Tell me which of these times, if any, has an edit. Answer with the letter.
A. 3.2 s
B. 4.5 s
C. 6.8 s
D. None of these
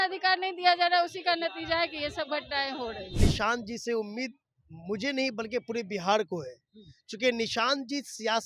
A